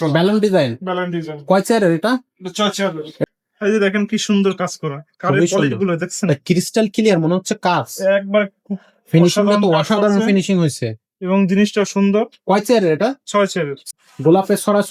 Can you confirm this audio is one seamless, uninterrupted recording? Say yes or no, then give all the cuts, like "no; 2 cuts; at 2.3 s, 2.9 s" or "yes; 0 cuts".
no; 2 cuts; at 3.2 s, 13.9 s